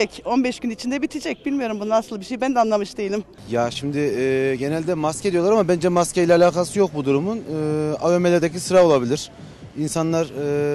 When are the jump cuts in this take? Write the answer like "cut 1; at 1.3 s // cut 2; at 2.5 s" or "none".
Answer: none